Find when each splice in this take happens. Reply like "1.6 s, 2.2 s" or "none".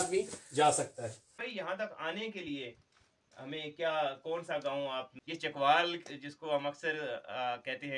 1.5 s, 5.2 s